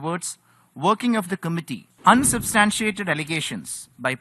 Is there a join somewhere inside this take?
yes; 1 cut; at 1.8 s

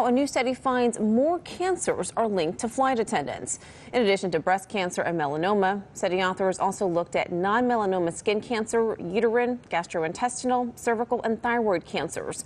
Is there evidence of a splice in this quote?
yes; 1 cut; at 6.9 s

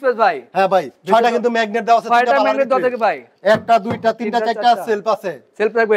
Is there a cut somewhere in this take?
no; 0 cuts

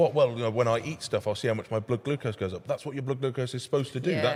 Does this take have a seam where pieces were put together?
no; 0 cuts

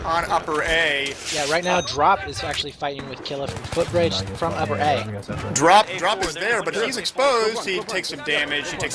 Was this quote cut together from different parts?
yes; 1 cut; at 5.0 s

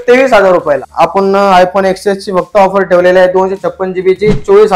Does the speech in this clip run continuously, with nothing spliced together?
no; 1 cut; at 0.9 s

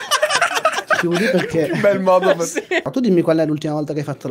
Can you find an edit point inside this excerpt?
yes; 1 cut; at 2.9 s

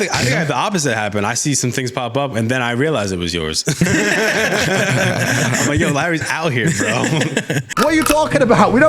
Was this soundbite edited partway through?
yes; 1 cut; at 7.7 s

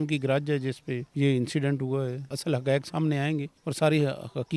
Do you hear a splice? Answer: yes; 3 cuts; at 1.1 s, 2.3 s, 3.6 s

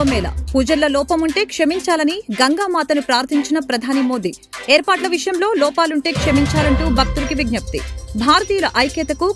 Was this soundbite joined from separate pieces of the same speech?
no; 0 cuts

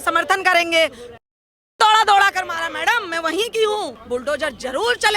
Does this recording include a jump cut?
yes; 1 cut; at 4.0 s

